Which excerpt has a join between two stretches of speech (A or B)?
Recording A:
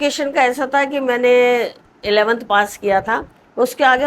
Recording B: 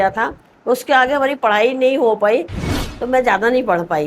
B